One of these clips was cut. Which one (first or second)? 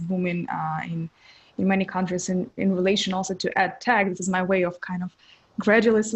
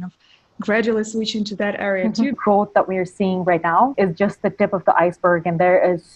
second